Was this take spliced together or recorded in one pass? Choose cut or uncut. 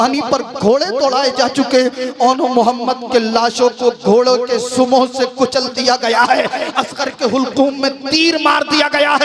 uncut